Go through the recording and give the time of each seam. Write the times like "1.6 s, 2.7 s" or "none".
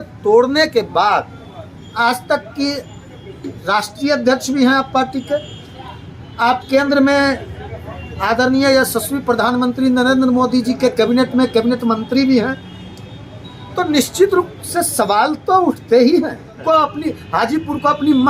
16.6 s